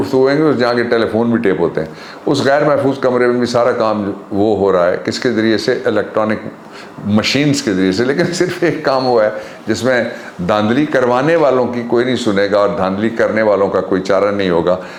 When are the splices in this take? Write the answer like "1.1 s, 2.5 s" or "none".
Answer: none